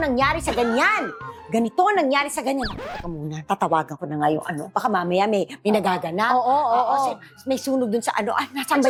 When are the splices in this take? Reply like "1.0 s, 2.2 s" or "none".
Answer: none